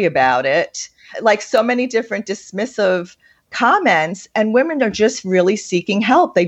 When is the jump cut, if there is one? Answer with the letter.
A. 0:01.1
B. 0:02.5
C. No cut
A